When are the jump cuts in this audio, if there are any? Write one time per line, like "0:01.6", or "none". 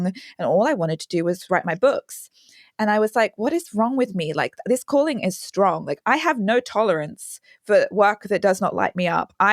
0:01.4
0:05.9